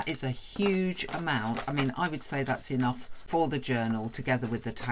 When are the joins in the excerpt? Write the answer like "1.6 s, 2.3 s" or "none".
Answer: 3.1 s